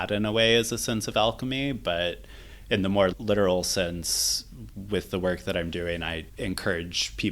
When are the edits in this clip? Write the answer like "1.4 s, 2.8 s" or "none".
6.2 s